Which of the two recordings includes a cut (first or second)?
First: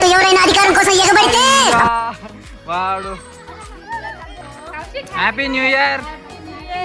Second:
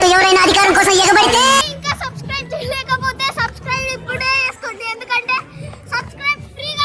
second